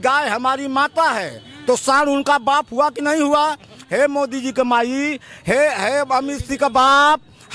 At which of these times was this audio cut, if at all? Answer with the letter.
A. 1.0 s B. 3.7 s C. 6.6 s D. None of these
B